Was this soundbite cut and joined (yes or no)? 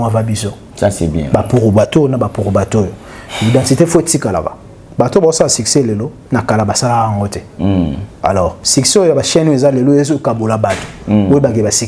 no